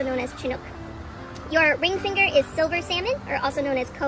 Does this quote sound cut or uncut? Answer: uncut